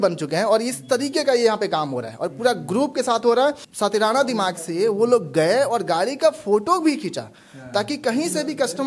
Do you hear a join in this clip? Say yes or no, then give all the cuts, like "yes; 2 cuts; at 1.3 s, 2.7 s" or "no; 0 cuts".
yes; 1 cut; at 3.7 s